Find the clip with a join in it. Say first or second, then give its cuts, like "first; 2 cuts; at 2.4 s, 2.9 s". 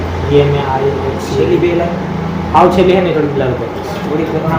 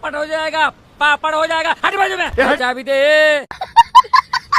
second; 2 cuts; at 2.7 s, 3.6 s